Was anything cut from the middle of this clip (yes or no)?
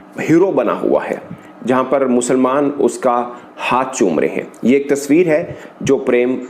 no